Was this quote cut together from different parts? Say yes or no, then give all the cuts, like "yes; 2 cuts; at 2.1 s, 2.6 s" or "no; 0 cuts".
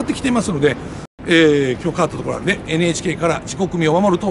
yes; 1 cut; at 1.1 s